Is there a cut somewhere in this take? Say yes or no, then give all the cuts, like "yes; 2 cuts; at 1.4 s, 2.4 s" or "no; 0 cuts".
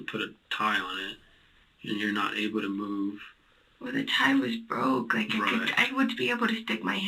no; 0 cuts